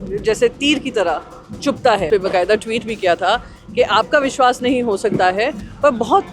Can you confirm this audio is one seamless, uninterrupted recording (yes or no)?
no